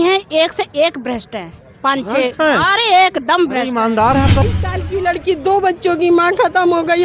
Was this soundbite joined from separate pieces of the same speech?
yes; 1 cut; at 4.4 s

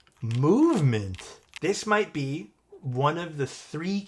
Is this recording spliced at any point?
yes; 1 cut; at 1.5 s

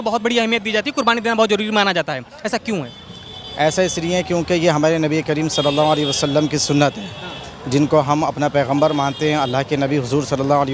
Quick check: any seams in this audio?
no; 0 cuts

